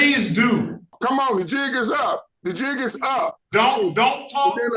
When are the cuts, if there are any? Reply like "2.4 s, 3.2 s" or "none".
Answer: 1.0 s, 2.3 s, 3.4 s